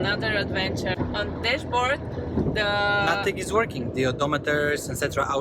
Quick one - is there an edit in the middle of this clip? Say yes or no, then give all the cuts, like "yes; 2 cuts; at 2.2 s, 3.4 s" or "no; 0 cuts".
yes; 1 cut; at 1.0 s